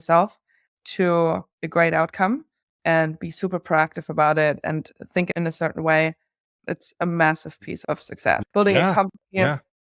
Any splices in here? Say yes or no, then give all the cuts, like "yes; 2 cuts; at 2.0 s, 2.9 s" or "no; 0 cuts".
yes; 3 cuts; at 5.3 s, 6.4 s, 8.4 s